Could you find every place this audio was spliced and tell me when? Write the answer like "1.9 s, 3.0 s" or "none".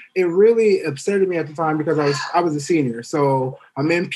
none